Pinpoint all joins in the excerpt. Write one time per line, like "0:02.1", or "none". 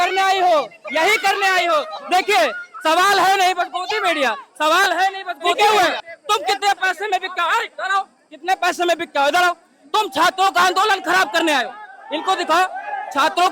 0:05.6